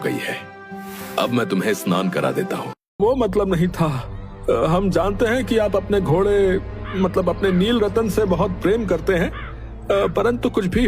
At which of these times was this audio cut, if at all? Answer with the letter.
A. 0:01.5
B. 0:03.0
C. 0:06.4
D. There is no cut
B